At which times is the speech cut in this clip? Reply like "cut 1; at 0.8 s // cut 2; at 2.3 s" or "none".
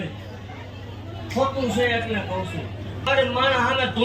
cut 1; at 3.0 s